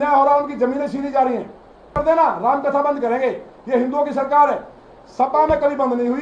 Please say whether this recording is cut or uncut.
cut